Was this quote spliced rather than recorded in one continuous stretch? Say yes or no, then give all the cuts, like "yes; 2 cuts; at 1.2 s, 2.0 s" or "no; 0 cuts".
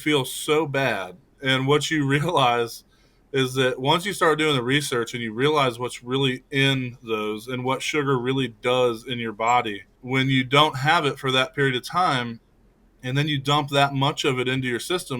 yes; 1 cut; at 1.3 s